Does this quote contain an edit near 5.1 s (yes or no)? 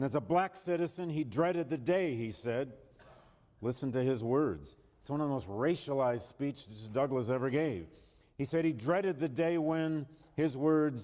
no